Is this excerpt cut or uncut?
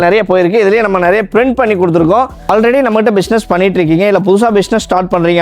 cut